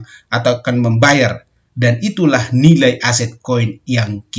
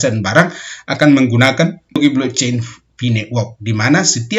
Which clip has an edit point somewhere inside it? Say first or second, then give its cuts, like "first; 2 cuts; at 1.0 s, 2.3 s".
second; 1 cut; at 2.0 s